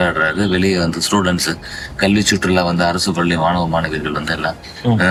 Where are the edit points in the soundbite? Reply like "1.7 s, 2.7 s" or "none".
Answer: none